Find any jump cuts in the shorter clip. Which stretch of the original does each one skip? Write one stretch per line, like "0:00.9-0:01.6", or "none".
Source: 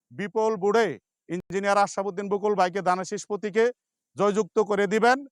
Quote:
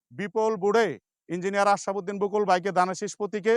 0:01.4-0:01.5